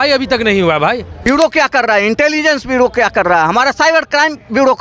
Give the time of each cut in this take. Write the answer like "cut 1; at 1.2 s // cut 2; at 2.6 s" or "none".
cut 1; at 1.1 s